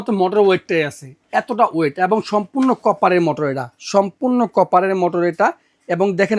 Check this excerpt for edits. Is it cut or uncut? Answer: uncut